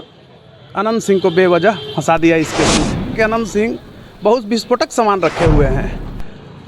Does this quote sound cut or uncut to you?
cut